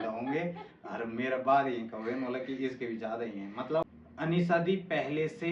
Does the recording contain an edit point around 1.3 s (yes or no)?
no